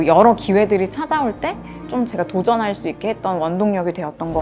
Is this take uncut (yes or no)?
yes